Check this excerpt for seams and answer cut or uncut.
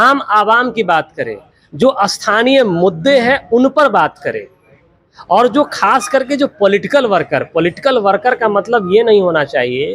uncut